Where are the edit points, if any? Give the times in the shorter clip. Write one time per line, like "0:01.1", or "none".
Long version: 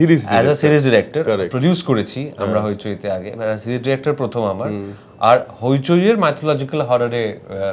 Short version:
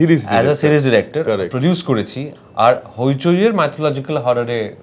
0:02.3